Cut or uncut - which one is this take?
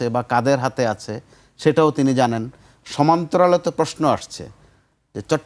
uncut